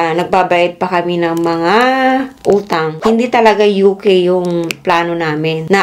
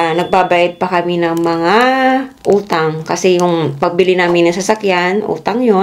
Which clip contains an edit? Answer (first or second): first